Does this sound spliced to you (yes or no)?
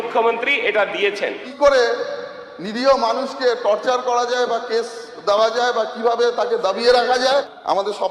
yes